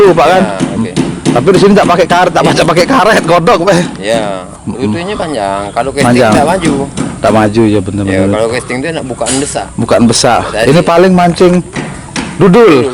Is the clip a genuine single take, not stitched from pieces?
yes; 0 cuts

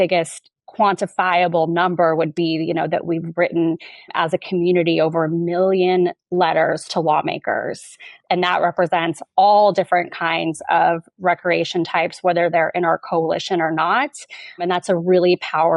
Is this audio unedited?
no; 3 cuts; at 4.1 s, 8.2 s, 14.6 s

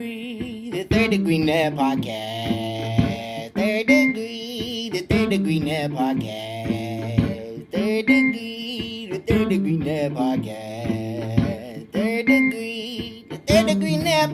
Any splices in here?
no; 0 cuts

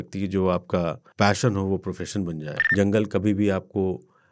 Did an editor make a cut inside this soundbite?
yes; 2 cuts; at 1.0 s, 2.5 s

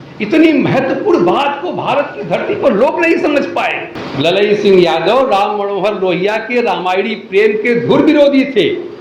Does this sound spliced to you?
yes; 1 cut; at 4.0 s

